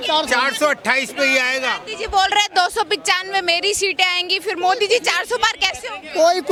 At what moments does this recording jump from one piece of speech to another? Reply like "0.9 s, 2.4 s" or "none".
none